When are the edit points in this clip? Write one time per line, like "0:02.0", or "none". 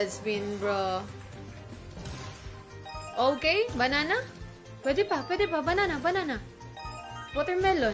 0:01.6